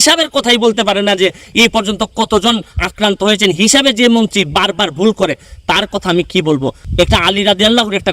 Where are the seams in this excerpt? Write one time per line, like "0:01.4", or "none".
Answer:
0:06.8